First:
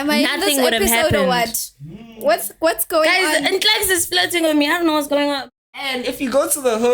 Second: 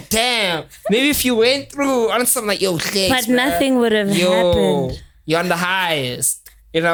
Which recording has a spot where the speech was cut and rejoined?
first; 1 cut; at 5.4 s

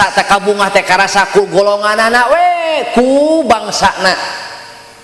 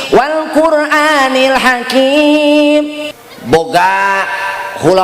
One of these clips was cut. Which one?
second; 1 cut; at 3.0 s

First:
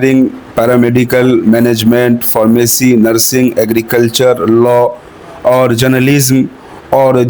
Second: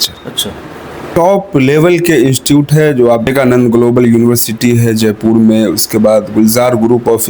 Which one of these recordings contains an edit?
second; 2 cuts; at 1.1 s, 3.3 s

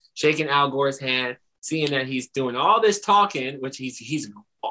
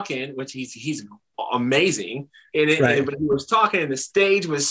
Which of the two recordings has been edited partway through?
second; 1 cut; at 2.4 s

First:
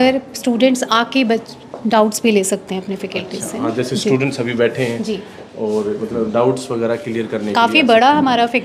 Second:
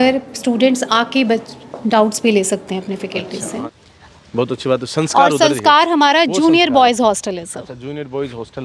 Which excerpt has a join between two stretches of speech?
second; 1 cut; at 3.6 s

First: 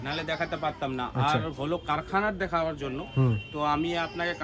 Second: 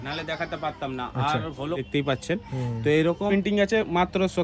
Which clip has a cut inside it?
second; 2 cuts; at 1.8 s, 3.3 s

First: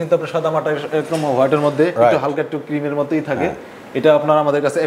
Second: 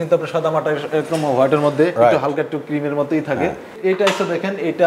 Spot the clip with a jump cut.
second; 1 cut; at 3.7 s

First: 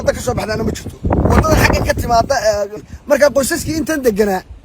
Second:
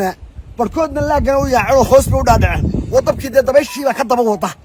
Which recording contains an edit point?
first; 1 cut; at 2.7 s

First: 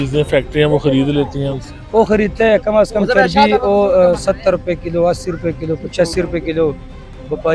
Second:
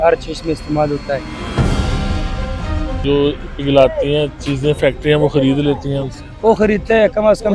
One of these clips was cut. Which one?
second; 2 cuts; at 1.4 s, 3.0 s

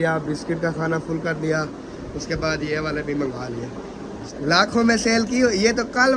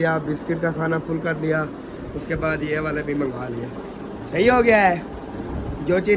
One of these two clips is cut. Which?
first; 1 cut; at 4.2 s

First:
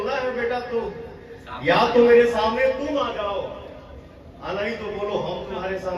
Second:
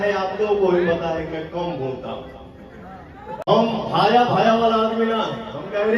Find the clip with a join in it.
second; 1 cut; at 3.4 s

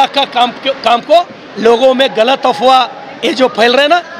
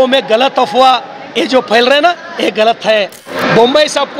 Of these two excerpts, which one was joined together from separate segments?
second; 1 cut; at 3.2 s

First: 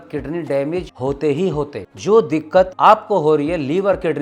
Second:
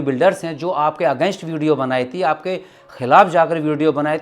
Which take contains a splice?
first; 3 cuts; at 0.9 s, 1.8 s, 2.7 s

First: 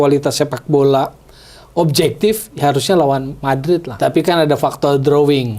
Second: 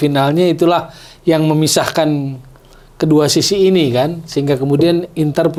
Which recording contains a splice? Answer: first; 1 cut; at 3.9 s

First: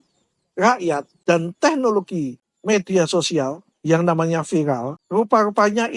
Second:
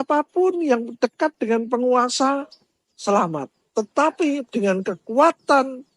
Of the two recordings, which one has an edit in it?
first; 3 cuts; at 1.1 s, 2.5 s, 5.0 s

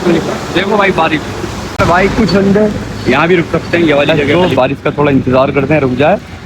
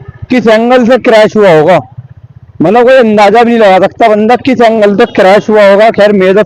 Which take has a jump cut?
first; 2 cuts; at 1.8 s, 4.2 s

